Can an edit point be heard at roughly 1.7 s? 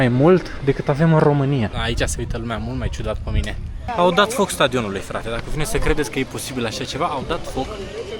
yes; 2 cuts; at 1.7 s, 3.9 s

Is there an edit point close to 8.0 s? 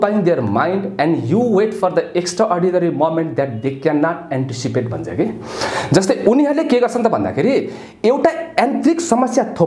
no; 0 cuts

